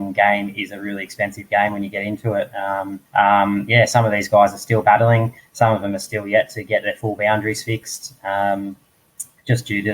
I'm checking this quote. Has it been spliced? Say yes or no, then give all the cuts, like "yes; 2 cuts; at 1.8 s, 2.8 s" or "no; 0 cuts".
yes; 1 cut; at 3.0 s